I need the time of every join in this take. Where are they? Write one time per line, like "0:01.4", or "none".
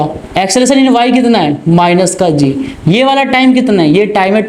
none